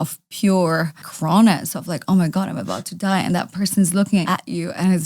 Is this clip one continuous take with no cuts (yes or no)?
no